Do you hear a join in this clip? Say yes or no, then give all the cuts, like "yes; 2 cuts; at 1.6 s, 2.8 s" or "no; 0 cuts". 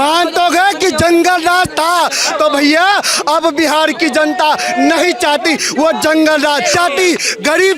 yes; 1 cut; at 6.7 s